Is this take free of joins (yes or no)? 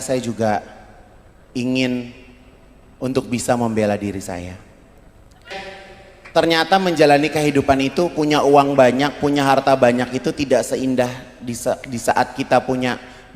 no